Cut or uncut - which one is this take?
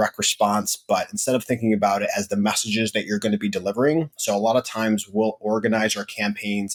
uncut